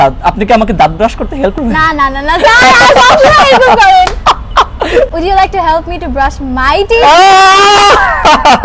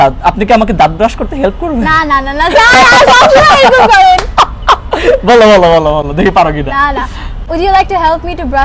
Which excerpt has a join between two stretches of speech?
first; 2 cuts; at 1.6 s, 5.1 s

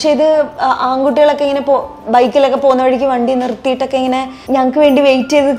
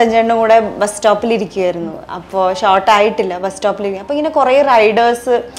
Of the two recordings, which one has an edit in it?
first; 1 cut; at 4.4 s

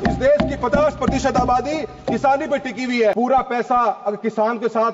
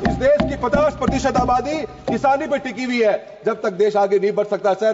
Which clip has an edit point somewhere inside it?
first; 1 cut; at 3.1 s

